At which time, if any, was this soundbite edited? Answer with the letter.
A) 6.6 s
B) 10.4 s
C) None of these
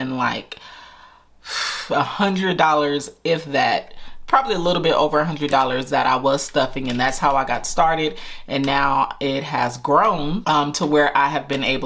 B